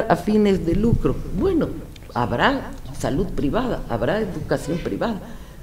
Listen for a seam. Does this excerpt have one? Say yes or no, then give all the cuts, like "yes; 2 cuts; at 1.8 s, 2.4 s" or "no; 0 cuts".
no; 0 cuts